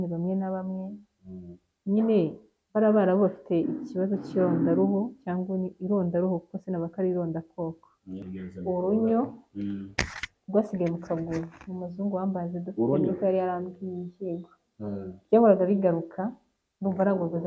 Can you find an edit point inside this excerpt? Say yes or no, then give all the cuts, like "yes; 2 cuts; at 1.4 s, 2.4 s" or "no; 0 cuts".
yes; 1 cut; at 8.1 s